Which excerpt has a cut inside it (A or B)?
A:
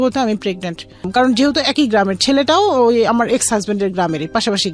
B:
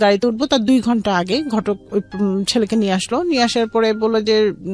A